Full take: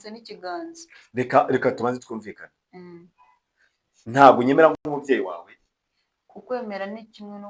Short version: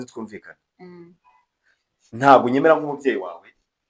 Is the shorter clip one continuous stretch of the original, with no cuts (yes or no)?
no